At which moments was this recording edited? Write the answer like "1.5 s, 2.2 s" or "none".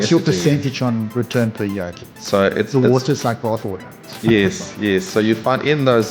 2.1 s